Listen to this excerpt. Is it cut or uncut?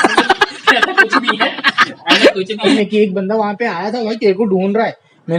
cut